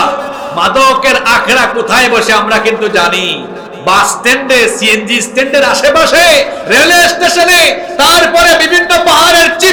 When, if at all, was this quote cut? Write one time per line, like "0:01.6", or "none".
none